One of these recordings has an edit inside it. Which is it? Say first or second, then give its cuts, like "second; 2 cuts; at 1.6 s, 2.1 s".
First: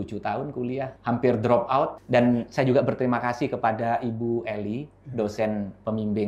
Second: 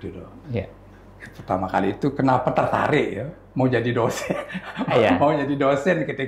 first; 2 cuts; at 1.0 s, 2.0 s